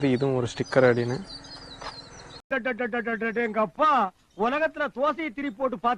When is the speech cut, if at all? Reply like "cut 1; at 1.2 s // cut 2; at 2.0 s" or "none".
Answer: cut 1; at 2.4 s